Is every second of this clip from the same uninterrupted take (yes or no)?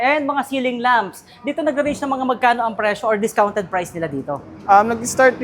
yes